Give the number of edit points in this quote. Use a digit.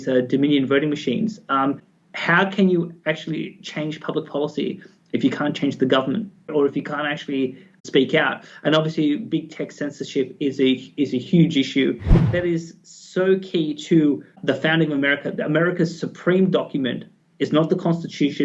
1